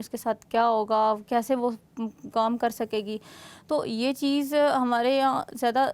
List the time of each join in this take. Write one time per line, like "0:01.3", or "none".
none